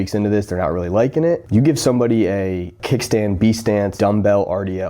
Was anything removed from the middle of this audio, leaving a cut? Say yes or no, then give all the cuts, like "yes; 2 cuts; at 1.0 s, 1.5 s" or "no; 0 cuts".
yes; 3 cuts; at 1.4 s, 2.8 s, 3.9 s